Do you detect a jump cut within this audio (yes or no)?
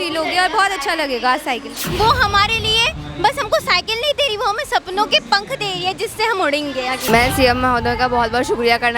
yes